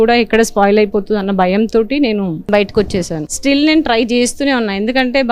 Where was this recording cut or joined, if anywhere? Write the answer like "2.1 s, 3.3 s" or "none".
2.4 s, 3.3 s